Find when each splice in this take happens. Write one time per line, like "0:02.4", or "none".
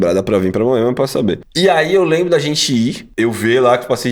0:01.5
0:03.0